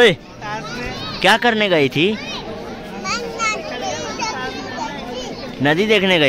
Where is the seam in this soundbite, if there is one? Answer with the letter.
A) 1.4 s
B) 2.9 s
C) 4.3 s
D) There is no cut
D